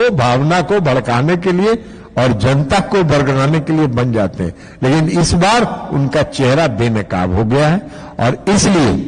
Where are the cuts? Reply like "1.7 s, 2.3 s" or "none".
none